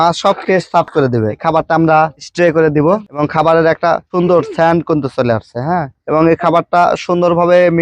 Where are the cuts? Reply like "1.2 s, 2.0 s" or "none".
1.3 s, 3.1 s